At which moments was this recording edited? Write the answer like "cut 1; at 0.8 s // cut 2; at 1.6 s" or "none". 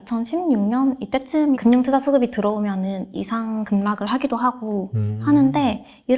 cut 1; at 1.6 s